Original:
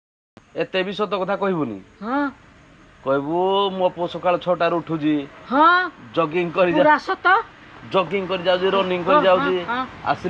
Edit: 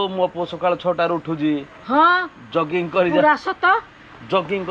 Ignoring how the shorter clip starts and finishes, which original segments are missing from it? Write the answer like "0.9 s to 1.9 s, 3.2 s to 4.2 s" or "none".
none